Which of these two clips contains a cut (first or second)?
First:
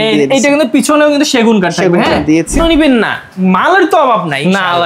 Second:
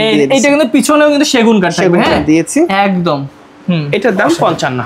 first